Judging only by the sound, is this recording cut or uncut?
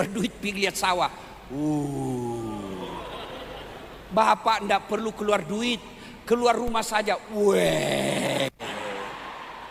uncut